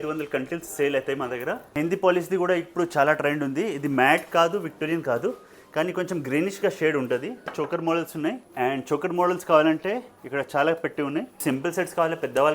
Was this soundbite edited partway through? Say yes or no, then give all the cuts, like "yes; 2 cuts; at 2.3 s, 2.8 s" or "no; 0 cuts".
yes; 4 cuts; at 1.7 s, 7.5 s, 8.4 s, 11.4 s